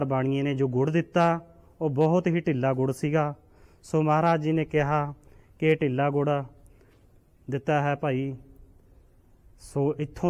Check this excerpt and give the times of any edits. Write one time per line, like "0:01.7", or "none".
none